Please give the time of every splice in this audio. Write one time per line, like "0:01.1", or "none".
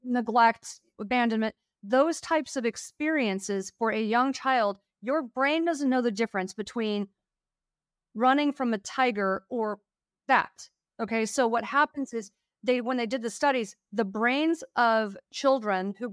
0:00.9